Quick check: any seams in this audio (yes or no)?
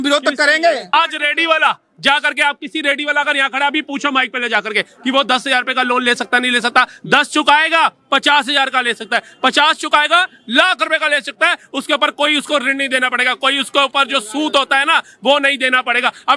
yes